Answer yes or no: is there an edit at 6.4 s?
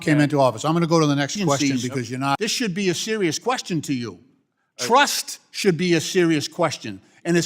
no